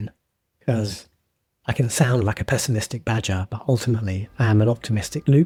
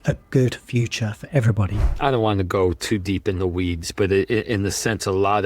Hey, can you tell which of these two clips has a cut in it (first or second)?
second